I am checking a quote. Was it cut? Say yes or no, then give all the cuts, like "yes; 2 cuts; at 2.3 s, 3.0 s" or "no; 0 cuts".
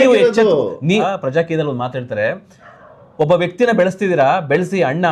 yes; 1 cut; at 1.1 s